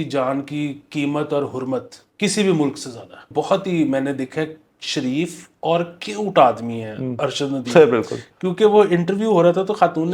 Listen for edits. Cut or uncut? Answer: cut